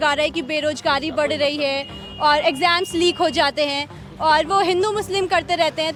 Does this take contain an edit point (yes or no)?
no